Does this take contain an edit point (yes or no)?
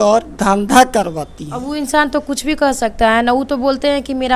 no